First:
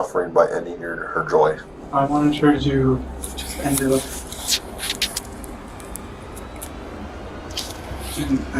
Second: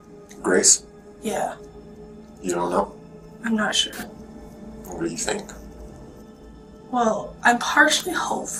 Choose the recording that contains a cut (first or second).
first